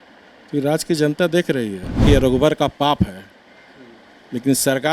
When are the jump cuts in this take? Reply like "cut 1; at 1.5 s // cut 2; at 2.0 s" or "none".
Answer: cut 1; at 2.0 s